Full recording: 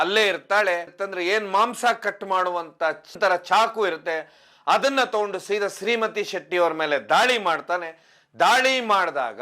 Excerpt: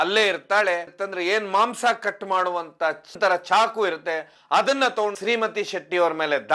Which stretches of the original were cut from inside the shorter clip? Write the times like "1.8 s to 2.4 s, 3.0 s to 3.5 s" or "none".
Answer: 4.3 s to 4.5 s, 5.3 s to 5.8 s